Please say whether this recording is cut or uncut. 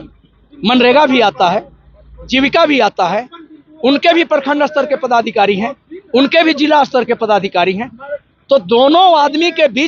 uncut